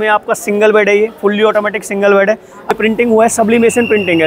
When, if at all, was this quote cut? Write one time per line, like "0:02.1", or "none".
0:02.7